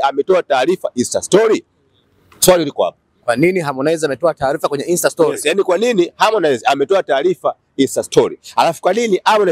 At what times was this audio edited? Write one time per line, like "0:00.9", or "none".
none